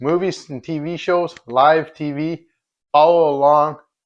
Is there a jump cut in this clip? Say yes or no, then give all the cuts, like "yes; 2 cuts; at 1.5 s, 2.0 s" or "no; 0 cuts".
no; 0 cuts